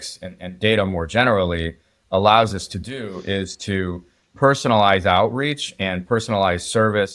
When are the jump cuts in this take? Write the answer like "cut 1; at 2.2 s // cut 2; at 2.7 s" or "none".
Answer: none